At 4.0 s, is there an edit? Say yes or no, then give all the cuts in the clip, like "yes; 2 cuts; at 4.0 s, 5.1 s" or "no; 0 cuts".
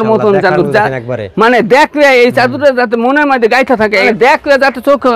yes; 1 cut; at 4.0 s